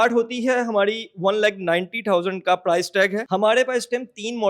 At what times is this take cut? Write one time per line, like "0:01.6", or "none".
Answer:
0:03.2

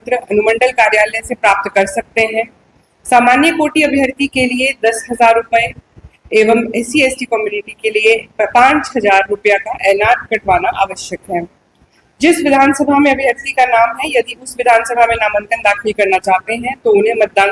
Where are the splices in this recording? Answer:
none

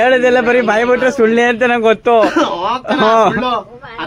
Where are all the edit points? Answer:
none

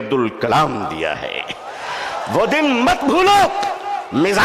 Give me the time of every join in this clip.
none

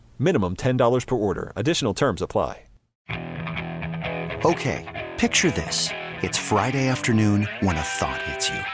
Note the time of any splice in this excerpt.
0:03.0

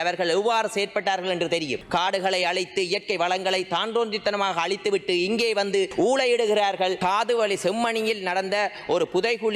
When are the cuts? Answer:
0:01.8
0:05.9
0:07.0

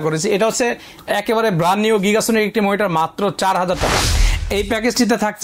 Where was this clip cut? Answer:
0:04.0

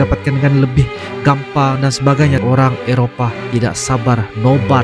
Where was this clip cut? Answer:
0:02.4

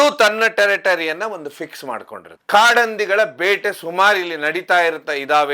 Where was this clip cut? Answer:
0:02.2

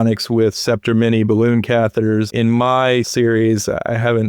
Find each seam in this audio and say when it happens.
0:02.3
0:03.1

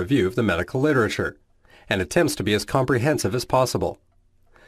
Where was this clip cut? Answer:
0:01.8

